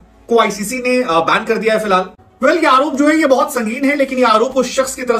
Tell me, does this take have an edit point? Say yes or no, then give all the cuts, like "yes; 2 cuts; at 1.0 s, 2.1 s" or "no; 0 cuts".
yes; 1 cut; at 2.2 s